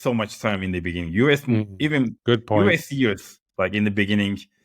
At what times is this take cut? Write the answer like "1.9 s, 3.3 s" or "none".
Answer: none